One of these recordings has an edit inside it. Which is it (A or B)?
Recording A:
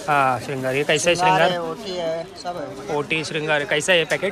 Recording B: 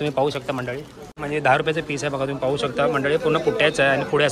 B